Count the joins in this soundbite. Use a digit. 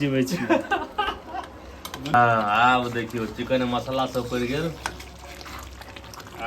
1